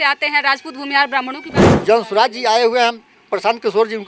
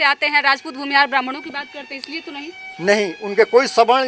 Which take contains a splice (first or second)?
first